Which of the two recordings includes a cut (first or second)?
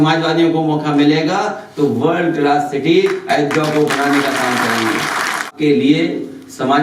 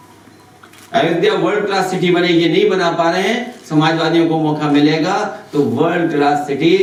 first